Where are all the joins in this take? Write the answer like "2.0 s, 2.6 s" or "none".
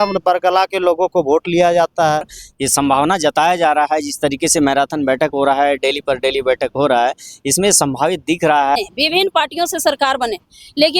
2.4 s, 8.8 s